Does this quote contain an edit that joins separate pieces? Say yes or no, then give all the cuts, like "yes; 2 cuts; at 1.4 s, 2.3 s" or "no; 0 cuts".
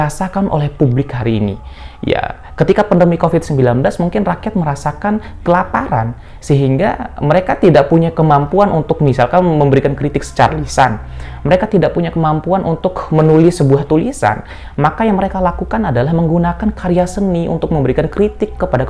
no; 0 cuts